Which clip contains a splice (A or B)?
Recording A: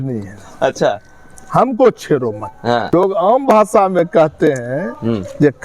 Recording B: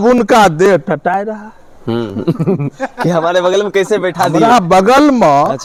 A